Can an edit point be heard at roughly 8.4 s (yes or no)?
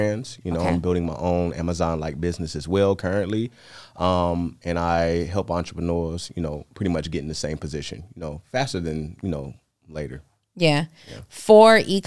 no